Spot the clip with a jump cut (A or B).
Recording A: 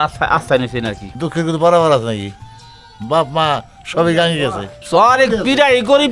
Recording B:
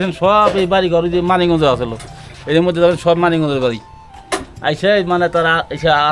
A